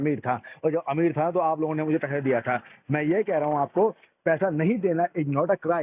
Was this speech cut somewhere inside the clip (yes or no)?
no